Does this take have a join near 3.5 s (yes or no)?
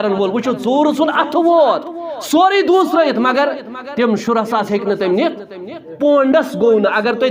no